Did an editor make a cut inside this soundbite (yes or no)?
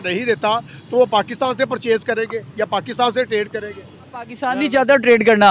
yes